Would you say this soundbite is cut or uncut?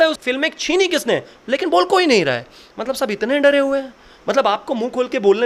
uncut